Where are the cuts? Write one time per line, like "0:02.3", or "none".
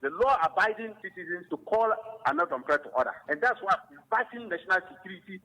none